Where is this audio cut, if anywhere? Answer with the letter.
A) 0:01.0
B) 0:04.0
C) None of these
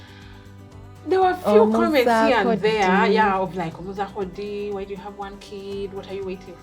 A